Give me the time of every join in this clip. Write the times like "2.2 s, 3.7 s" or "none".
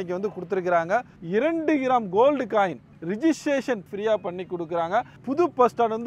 1.1 s, 2.9 s, 3.8 s, 5.2 s